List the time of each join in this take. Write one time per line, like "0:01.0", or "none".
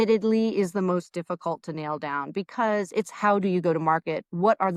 none